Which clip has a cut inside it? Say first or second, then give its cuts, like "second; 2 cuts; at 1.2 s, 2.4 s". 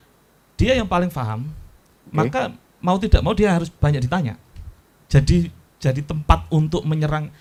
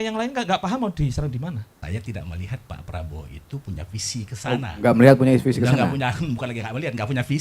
second; 1 cut; at 1.7 s